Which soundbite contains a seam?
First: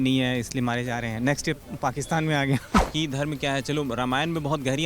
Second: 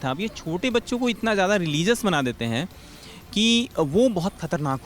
first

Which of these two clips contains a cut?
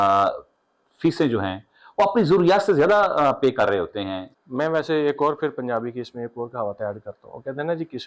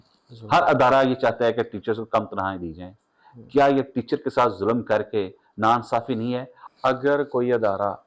second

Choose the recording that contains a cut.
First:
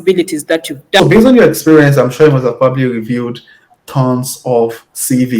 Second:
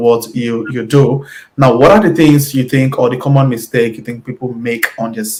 first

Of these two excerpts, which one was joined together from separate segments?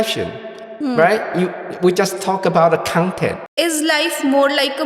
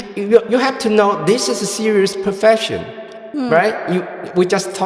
first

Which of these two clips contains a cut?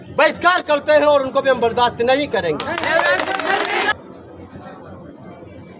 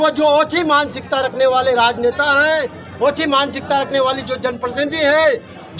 first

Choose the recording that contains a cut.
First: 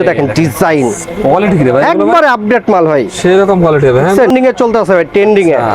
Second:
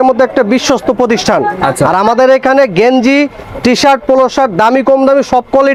first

